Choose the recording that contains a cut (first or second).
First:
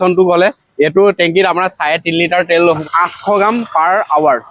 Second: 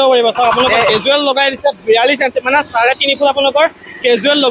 first